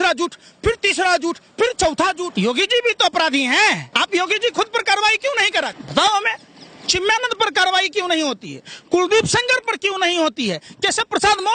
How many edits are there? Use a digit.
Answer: 3